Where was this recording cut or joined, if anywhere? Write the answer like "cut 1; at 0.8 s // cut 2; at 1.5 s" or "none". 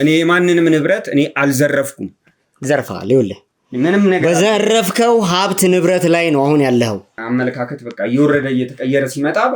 cut 1; at 7.1 s